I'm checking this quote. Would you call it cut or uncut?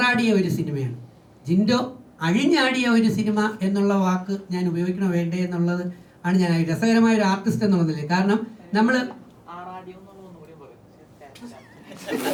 uncut